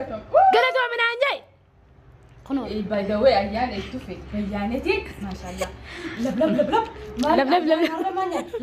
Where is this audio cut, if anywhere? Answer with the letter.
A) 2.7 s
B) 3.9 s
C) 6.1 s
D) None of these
A